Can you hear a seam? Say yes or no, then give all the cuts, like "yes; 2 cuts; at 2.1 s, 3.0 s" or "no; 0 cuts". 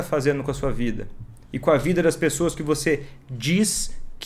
no; 0 cuts